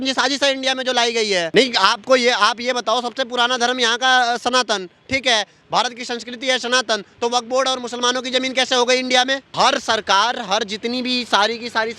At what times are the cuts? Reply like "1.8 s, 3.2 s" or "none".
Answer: 1.5 s, 9.5 s